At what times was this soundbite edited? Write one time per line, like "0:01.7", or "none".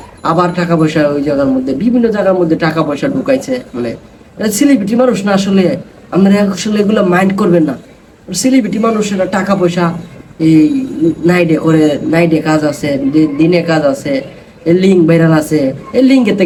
none